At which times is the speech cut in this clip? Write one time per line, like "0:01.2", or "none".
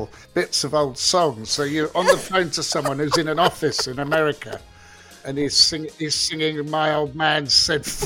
none